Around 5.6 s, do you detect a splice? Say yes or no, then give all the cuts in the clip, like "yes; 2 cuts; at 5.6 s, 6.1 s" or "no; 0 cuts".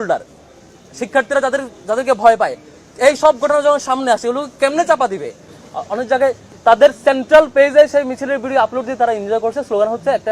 yes; 1 cut; at 5.6 s